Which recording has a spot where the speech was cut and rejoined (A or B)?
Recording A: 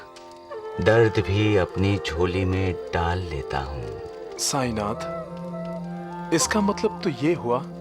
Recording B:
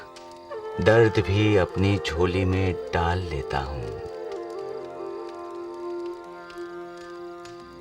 A